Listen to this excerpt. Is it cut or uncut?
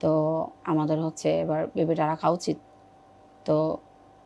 uncut